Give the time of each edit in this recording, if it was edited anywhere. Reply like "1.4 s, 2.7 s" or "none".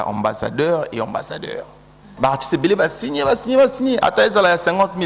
2.1 s